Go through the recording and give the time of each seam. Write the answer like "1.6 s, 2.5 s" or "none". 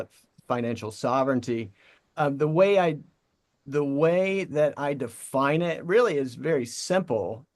none